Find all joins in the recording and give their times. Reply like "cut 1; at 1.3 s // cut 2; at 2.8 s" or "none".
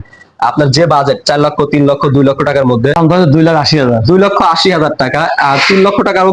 cut 1; at 2.9 s